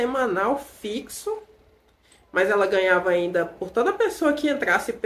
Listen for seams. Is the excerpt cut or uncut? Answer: uncut